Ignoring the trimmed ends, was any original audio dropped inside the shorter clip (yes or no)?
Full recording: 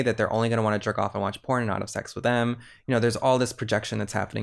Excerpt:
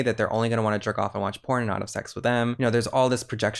yes